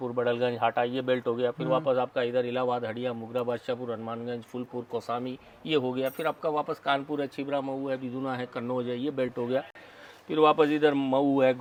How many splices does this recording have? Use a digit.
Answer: 0